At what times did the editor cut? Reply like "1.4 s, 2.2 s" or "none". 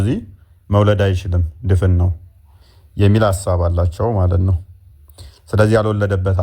none

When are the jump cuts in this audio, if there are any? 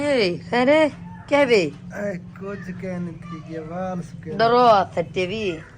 none

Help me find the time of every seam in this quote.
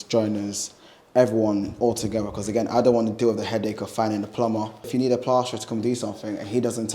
4.9 s

